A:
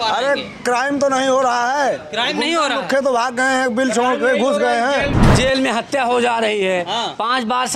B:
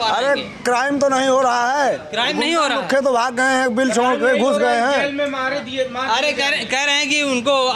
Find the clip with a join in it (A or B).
A